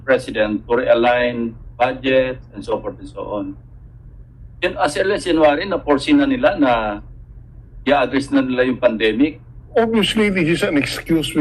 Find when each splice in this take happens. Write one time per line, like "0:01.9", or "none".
0:09.5